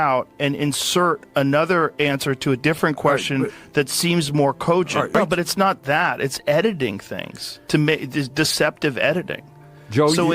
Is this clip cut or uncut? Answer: cut